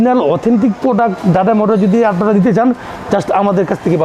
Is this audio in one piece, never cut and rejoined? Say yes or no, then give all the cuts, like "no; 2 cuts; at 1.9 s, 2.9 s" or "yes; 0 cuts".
yes; 0 cuts